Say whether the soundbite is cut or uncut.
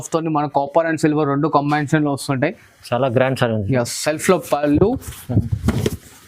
uncut